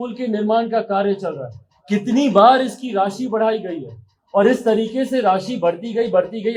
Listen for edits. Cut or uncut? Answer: uncut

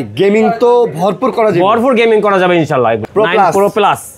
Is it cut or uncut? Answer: cut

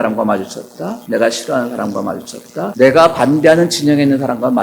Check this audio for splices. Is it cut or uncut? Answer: cut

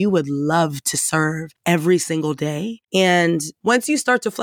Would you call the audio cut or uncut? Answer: cut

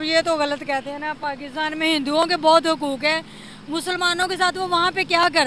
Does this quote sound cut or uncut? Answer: uncut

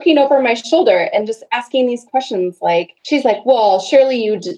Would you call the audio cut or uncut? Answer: cut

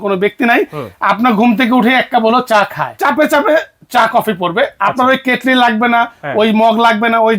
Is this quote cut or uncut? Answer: cut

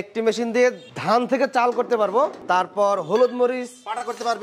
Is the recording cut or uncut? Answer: cut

